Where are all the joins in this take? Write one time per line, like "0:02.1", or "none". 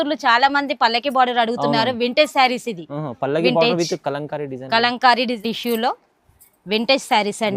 0:05.3

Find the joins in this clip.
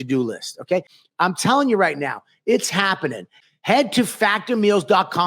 0:01.0

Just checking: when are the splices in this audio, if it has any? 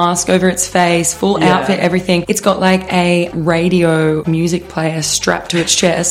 0:02.3
0:04.2

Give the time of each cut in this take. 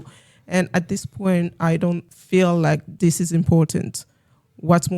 0:02.1
0:02.9

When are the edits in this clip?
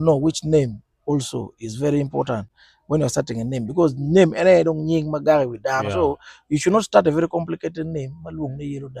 none

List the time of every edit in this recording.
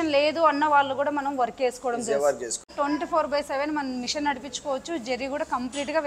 0:02.7

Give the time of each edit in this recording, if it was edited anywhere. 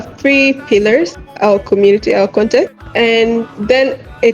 0:01.2
0:02.8

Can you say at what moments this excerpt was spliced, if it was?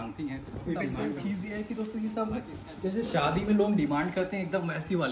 0:01.1

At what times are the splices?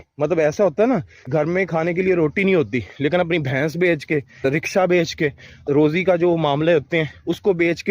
0:01.1
0:04.4
0:05.6

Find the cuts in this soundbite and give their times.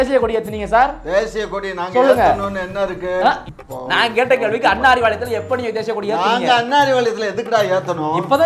0:03.5

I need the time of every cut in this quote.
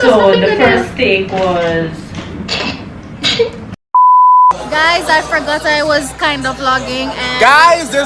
0:03.7
0:04.6

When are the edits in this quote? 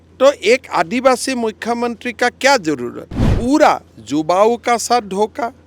0:03.3

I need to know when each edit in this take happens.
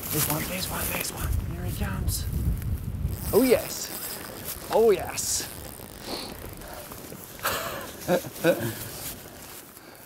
0:01.3
0:03.2

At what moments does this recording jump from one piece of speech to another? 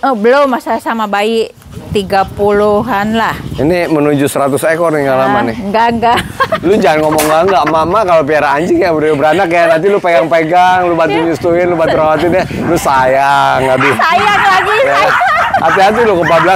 none

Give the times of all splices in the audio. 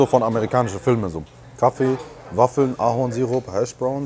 none

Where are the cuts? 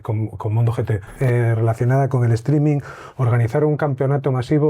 0:01.1

